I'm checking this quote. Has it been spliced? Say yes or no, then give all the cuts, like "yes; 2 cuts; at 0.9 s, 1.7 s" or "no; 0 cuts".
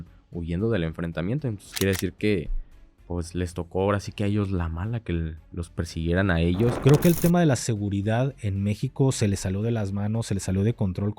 yes; 1 cut; at 6.8 s